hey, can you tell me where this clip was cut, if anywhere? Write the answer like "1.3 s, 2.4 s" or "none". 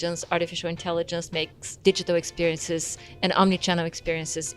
1.6 s